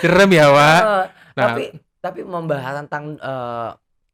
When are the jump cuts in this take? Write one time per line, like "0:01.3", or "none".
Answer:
none